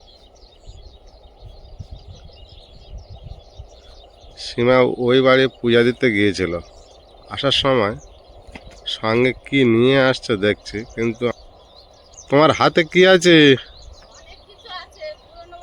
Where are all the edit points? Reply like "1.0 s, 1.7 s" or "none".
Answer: 11.3 s

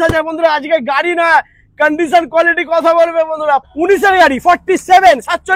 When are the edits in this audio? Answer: 3.7 s

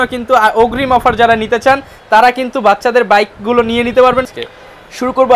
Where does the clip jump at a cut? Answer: 4.3 s

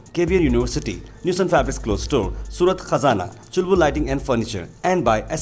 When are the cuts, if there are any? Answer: none

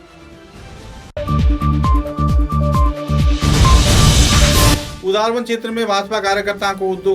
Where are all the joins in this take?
4.8 s

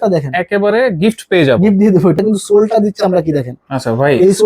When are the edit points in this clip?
2.2 s

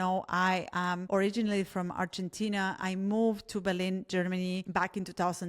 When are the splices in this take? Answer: 1.0 s

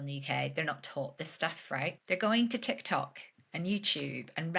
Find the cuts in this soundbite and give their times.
2.0 s

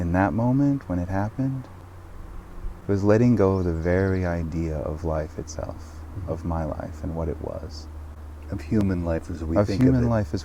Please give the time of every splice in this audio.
none

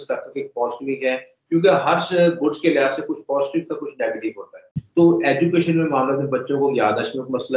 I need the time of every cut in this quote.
4.8 s

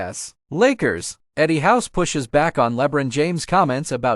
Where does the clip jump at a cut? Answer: 1.2 s

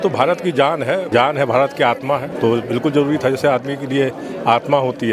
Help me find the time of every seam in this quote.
1.1 s, 2.3 s

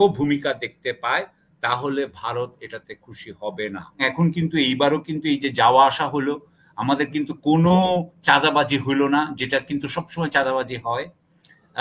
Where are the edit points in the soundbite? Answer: 4.0 s

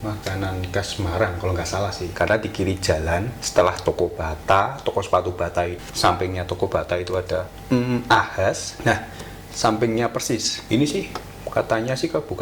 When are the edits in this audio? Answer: 2.0 s, 3.4 s, 5.8 s, 7.5 s, 10.5 s

